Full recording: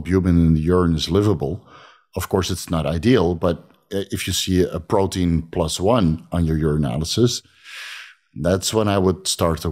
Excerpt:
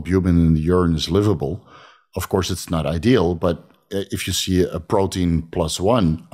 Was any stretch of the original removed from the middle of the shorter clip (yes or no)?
no